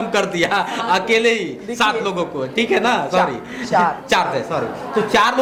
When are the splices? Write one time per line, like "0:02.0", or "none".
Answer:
none